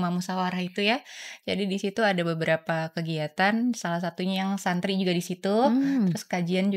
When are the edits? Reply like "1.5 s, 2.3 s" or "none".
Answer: none